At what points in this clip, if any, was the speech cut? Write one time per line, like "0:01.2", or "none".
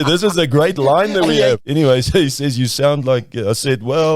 0:01.6